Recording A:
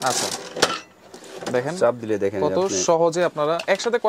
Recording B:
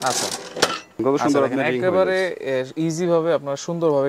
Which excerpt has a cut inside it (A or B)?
B